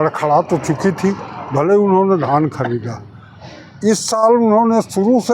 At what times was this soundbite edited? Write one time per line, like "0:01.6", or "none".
none